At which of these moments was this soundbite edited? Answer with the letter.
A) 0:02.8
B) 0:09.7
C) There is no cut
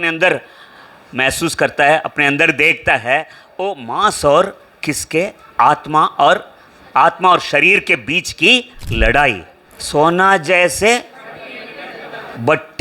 B